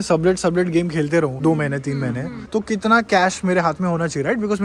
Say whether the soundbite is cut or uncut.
uncut